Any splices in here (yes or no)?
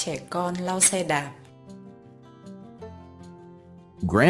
no